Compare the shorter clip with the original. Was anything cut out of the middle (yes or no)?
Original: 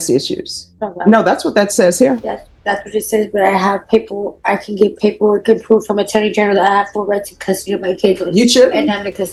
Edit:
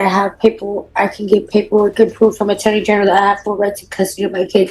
no